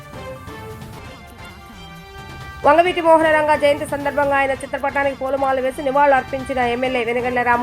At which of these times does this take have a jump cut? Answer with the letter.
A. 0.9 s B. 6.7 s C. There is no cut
A